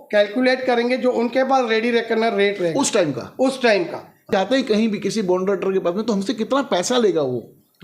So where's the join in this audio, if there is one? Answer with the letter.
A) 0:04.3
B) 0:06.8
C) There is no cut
A